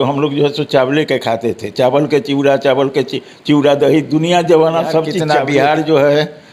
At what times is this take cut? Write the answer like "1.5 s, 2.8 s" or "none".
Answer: 5.1 s